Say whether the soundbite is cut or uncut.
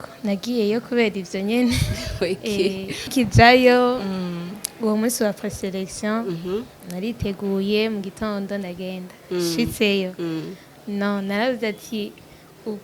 cut